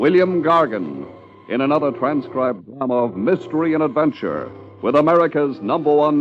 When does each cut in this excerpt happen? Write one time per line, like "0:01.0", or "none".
none